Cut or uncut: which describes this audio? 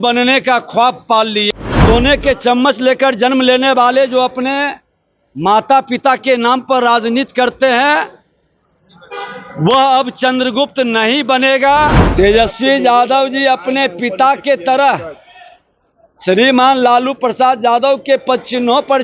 cut